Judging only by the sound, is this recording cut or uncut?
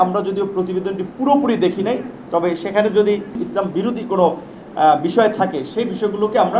cut